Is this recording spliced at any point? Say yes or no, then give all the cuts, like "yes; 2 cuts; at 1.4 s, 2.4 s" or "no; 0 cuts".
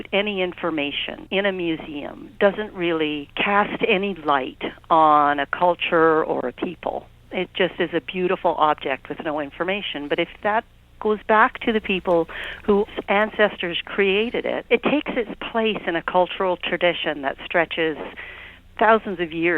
yes; 4 cuts; at 1.1 s, 3.3 s, 13.0 s, 14.6 s